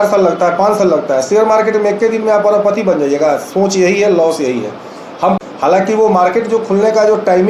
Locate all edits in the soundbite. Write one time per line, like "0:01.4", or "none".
0:05.4